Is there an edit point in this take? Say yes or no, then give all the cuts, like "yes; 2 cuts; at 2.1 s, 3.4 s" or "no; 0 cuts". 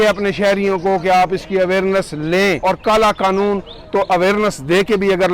yes; 1 cut; at 2.6 s